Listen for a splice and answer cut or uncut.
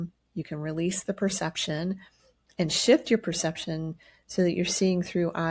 uncut